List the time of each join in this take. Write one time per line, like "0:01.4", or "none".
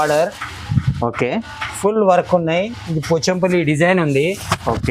none